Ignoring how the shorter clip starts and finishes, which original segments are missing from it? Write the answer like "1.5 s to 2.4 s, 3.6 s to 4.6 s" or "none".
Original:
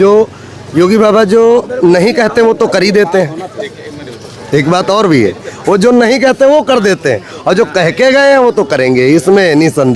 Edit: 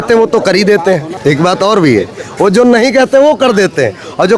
3.4 s to 4.4 s